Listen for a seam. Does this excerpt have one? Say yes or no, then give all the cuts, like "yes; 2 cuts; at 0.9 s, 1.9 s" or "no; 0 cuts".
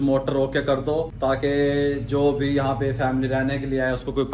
yes; 1 cut; at 1.1 s